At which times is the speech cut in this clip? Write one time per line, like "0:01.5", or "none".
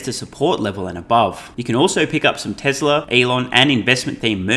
0:01.5
0:03.1